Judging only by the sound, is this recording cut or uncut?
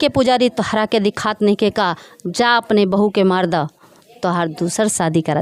uncut